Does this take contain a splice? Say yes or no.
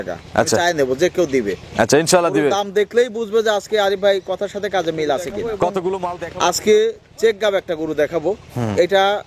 yes